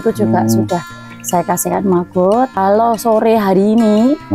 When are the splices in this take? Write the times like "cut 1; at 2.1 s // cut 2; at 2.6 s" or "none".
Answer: cut 1; at 2.5 s